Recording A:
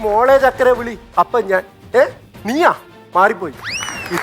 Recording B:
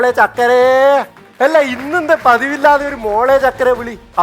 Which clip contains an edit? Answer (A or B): B